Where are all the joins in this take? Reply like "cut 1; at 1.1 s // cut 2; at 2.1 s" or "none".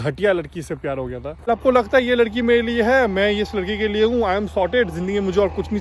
cut 1; at 1.3 s